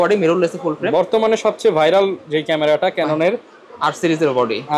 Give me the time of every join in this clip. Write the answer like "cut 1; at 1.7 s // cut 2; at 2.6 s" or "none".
none